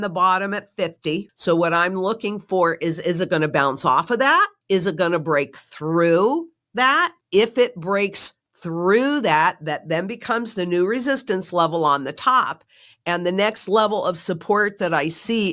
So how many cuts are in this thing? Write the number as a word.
three